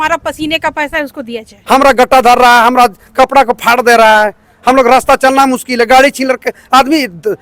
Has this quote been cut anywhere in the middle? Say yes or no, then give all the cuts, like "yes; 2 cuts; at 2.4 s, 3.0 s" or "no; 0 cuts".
yes; 1 cut; at 1.6 s